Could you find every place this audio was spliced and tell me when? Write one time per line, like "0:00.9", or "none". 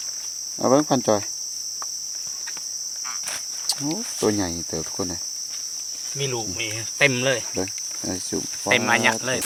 none